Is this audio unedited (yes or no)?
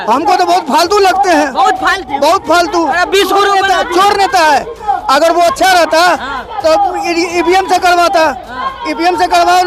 yes